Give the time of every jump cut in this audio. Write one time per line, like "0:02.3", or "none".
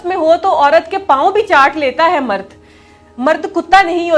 none